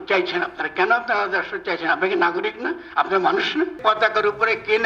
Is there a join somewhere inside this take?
yes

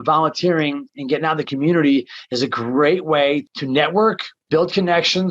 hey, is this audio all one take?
no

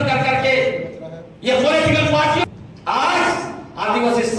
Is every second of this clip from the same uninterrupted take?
no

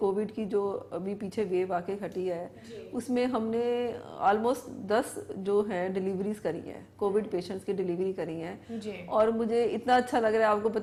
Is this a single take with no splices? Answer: yes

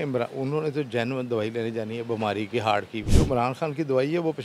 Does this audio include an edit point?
no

